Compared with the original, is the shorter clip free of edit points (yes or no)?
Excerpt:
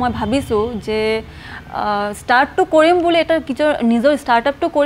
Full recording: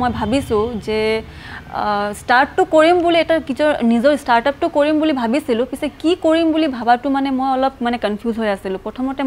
yes